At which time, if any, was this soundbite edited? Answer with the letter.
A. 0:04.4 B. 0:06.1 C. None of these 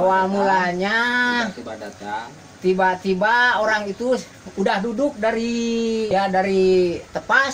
B